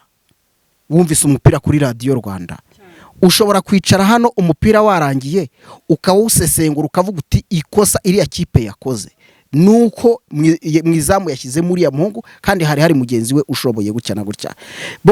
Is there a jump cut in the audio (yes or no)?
no